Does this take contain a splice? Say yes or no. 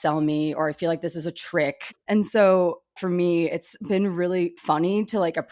yes